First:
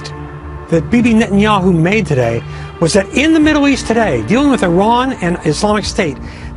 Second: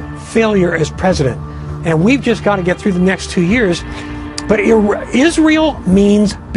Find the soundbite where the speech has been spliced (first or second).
first